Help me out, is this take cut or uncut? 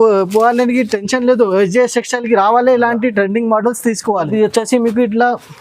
cut